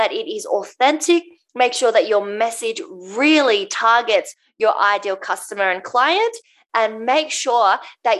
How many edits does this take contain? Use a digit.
0